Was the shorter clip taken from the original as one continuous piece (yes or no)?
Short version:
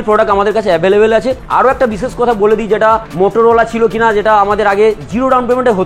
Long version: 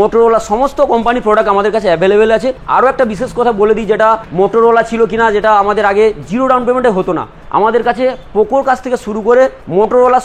yes